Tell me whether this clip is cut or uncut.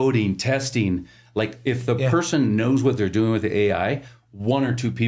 uncut